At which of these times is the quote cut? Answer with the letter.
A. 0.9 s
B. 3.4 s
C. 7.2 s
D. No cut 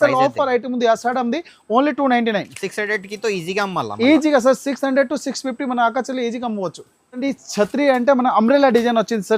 C